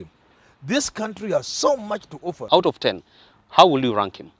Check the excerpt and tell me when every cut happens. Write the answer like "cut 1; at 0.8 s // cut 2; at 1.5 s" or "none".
cut 1; at 2.4 s

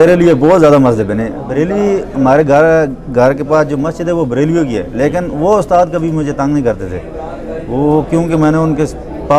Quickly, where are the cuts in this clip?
none

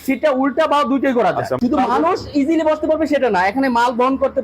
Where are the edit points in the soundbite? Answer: cut 1; at 1.5 s

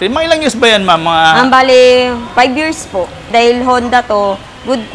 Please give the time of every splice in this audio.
cut 1; at 3.3 s

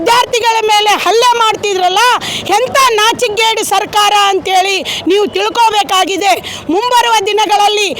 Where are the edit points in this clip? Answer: none

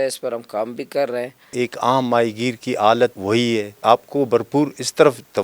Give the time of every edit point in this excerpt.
cut 1; at 1.5 s // cut 2; at 3.6 s

